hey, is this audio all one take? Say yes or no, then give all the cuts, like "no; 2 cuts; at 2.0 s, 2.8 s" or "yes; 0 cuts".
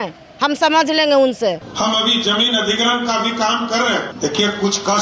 no; 2 cuts; at 1.7 s, 4.1 s